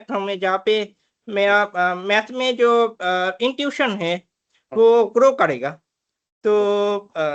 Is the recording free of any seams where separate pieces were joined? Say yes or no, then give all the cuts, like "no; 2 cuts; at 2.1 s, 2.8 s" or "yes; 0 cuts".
yes; 0 cuts